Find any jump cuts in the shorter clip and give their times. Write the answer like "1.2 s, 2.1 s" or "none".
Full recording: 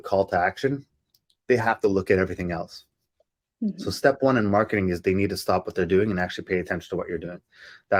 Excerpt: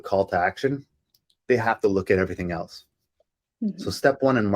none